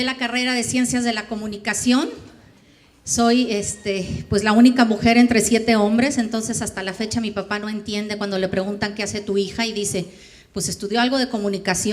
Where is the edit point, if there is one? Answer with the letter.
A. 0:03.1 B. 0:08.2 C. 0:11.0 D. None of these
A